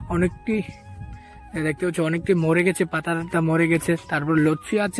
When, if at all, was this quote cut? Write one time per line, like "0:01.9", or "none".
none